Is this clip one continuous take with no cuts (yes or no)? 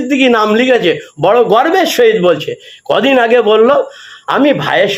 yes